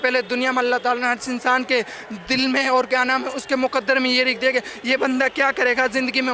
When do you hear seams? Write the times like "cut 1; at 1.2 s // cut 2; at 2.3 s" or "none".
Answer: cut 1; at 3.8 s